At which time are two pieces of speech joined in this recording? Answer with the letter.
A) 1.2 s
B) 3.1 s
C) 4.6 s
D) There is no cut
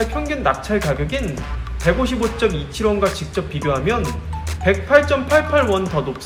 D